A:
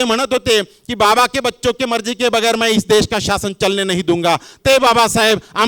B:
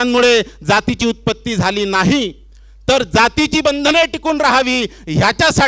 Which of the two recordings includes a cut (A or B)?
A